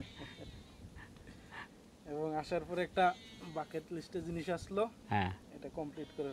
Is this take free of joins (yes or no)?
yes